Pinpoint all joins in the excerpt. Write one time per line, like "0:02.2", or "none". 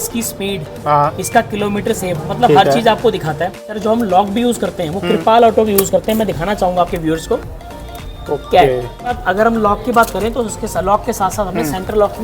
0:03.7
0:09.2